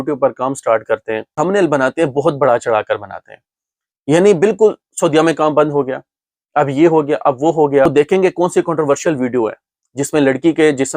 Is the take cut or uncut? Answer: cut